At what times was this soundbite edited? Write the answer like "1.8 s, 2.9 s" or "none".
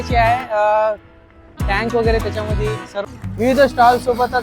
3.1 s

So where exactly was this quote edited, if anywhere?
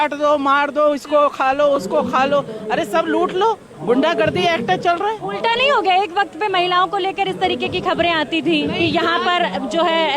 none

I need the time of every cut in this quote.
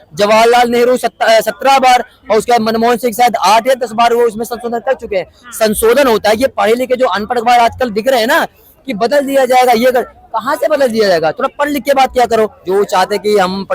12.6 s

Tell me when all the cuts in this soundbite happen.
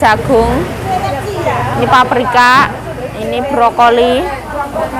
none

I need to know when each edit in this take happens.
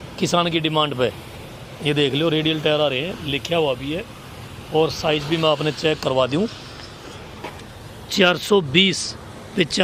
none

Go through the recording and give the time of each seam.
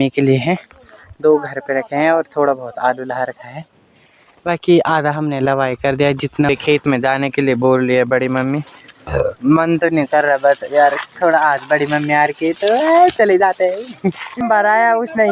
6.5 s, 14.4 s

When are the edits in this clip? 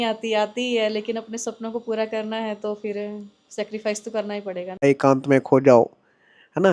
4.8 s

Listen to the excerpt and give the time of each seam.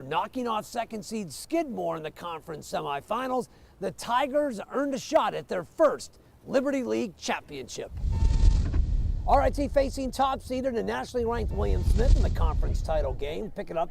2.9 s

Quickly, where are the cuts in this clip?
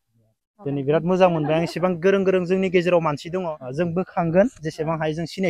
3.6 s

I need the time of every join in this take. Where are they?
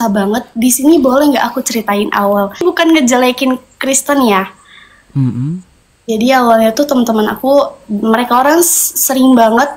2.6 s

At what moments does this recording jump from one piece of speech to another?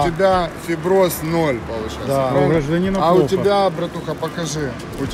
none

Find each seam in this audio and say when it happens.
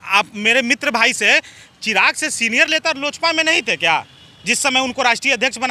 none

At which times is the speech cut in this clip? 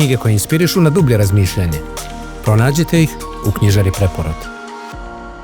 4.3 s

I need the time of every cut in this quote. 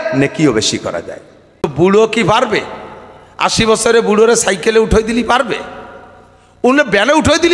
1.7 s

